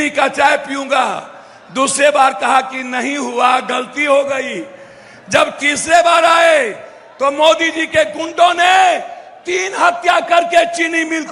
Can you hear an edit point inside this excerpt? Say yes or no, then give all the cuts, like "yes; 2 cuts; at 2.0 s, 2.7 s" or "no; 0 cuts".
no; 0 cuts